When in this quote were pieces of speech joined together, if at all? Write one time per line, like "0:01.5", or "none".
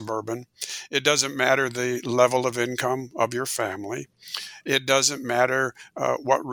none